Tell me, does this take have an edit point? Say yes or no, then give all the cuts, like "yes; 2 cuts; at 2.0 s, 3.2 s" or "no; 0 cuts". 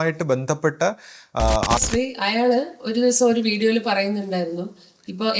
yes; 1 cut; at 1.8 s